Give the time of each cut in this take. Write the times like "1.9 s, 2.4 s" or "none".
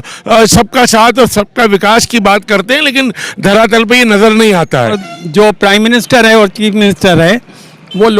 5.1 s